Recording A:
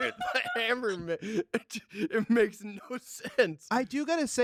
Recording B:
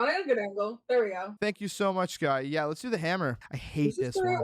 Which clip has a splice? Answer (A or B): B